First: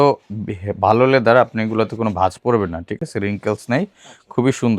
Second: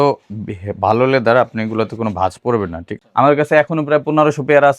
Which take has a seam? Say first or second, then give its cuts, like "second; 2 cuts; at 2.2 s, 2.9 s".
second; 1 cut; at 3.0 s